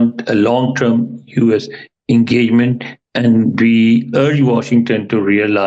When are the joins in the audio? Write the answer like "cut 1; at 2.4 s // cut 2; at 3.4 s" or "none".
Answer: none

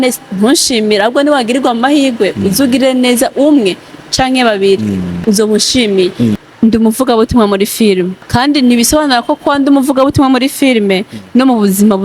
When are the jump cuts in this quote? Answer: cut 1; at 5.2 s // cut 2; at 6.4 s // cut 3; at 8.2 s

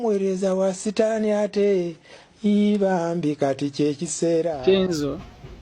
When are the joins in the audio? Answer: cut 1; at 4.6 s

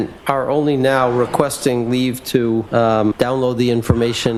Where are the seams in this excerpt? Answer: none

